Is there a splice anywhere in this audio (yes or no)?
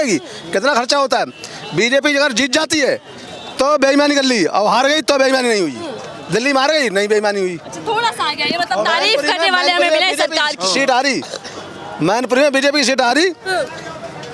no